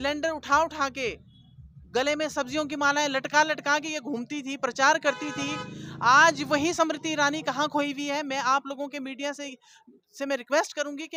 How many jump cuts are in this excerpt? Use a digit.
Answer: 0